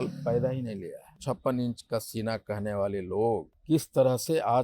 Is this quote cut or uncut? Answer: cut